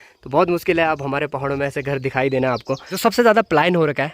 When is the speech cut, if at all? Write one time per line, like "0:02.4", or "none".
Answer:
0:02.8